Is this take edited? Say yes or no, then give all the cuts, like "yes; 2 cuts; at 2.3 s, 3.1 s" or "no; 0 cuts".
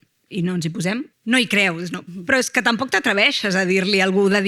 yes; 1 cut; at 1.1 s